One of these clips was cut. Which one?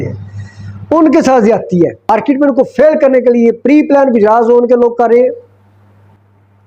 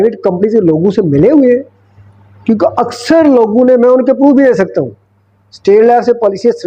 first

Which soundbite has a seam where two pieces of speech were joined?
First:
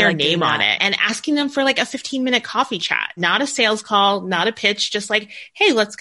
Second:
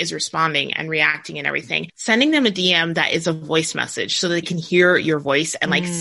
second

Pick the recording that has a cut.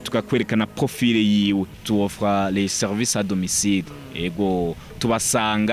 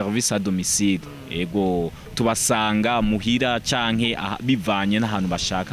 first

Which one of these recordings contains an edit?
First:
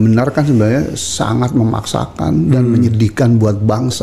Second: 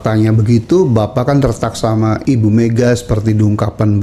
second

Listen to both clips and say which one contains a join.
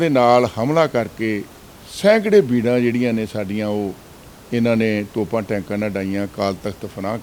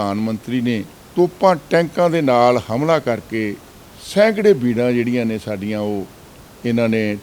second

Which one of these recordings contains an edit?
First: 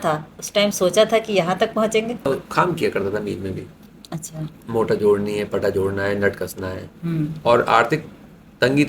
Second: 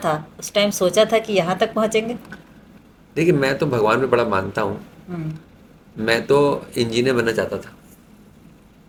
first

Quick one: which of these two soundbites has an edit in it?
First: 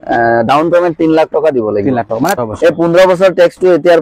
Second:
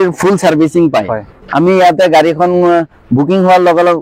first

